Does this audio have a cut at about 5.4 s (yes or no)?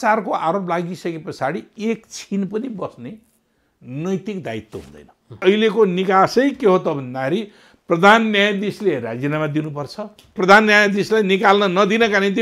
yes